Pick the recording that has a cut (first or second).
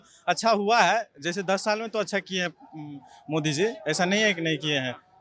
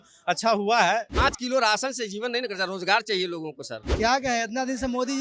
second